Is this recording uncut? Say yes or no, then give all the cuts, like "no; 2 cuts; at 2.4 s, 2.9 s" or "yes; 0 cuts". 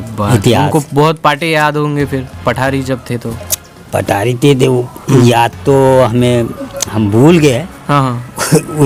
yes; 0 cuts